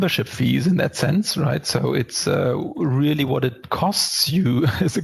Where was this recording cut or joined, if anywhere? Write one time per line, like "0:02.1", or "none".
none